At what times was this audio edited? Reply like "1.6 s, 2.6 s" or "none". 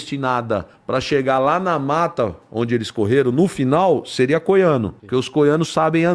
5.0 s